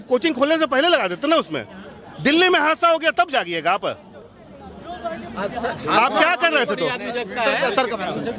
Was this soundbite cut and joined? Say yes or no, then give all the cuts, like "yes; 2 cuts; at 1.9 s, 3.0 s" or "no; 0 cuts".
no; 0 cuts